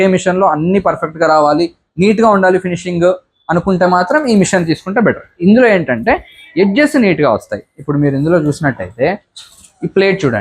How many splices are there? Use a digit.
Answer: 0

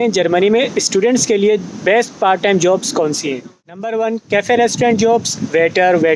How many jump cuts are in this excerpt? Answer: 1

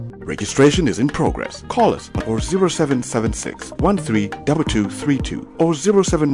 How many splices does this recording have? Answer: 0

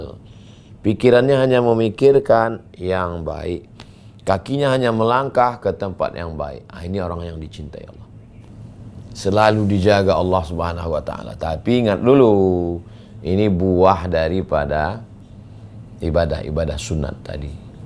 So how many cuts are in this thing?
1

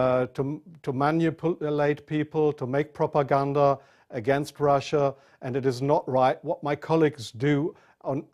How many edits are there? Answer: 0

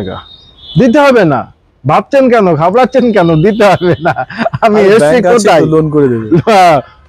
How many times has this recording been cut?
0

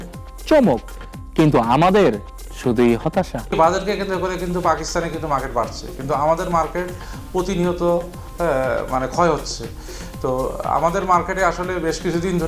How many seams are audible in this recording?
1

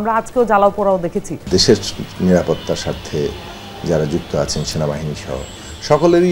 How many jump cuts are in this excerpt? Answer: 1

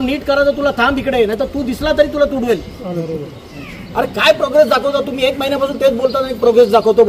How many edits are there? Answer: 1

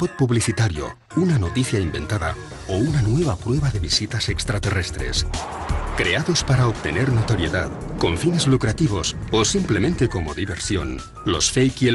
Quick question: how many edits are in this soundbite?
1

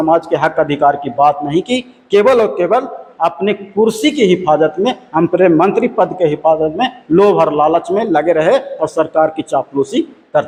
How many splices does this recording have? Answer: 0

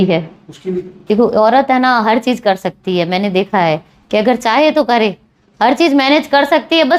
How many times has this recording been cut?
1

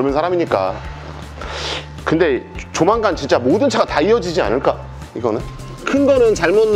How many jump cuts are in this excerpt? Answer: 2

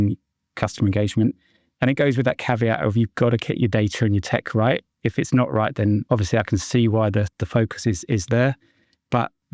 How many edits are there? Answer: 0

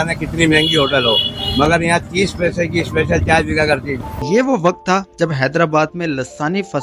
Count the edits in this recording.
1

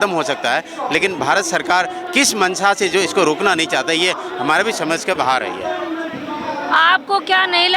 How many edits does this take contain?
0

